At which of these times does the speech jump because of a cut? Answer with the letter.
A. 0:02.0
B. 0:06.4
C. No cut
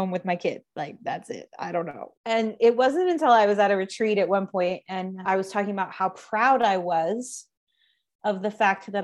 A